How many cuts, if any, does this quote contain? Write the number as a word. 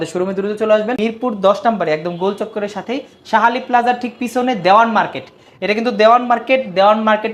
one